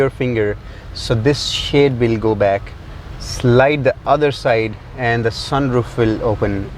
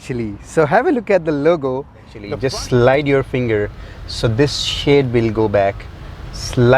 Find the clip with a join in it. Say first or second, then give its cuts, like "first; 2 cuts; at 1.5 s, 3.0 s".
second; 1 cut; at 2.2 s